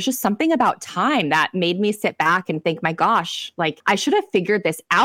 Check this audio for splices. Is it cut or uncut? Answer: cut